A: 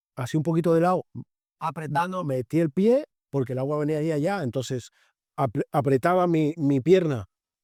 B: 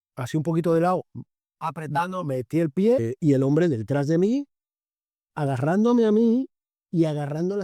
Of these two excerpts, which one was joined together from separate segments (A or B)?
B